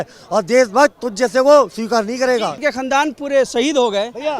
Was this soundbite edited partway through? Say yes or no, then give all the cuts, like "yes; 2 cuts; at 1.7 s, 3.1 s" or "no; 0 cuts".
yes; 1 cut; at 2.5 s